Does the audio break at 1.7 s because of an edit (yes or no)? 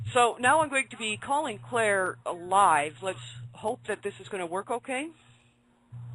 no